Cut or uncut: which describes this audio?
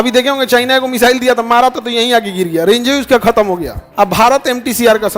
cut